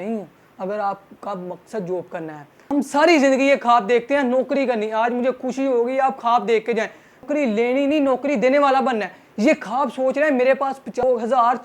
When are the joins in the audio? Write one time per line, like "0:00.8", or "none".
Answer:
0:02.7